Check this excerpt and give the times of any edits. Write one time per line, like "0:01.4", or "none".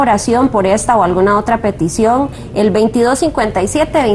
0:01.8